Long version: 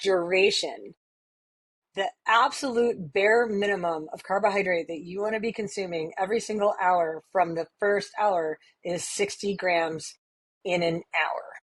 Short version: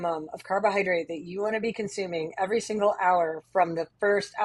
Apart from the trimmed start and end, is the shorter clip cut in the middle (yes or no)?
no